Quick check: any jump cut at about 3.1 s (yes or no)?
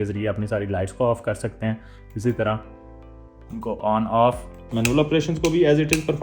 no